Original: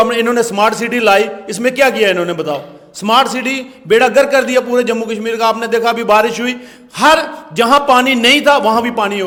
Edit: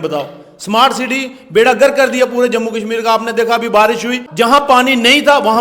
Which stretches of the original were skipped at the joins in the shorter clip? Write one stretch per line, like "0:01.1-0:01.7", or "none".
0:06.6-0:07.4